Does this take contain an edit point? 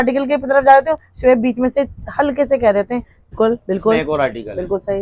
yes; 1 cut; at 3.3 s

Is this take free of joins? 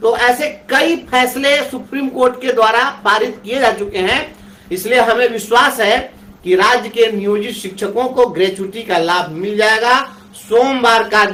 yes; 0 cuts

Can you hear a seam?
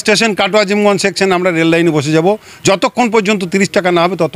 no; 0 cuts

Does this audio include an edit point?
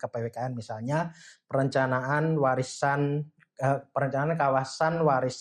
no; 0 cuts

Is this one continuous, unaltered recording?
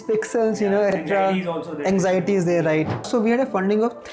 no; 2 cuts; at 0.9 s, 3.0 s

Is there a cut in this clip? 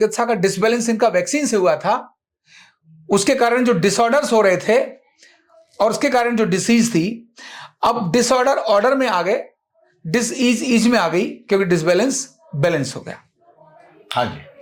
no; 0 cuts

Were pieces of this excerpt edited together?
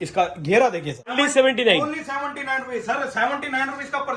yes; 1 cut; at 1.1 s

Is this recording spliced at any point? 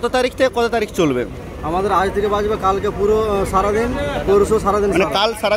no; 0 cuts

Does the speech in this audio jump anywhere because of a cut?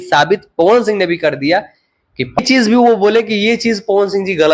yes; 1 cut; at 2.4 s

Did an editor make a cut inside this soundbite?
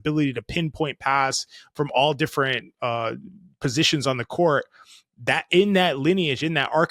no; 0 cuts

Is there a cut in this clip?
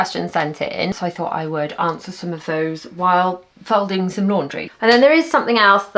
yes; 2 cuts; at 0.9 s, 4.6 s

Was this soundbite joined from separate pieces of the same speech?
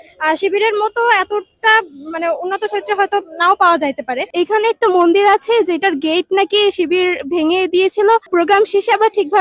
yes; 2 cuts; at 4.3 s, 8.3 s

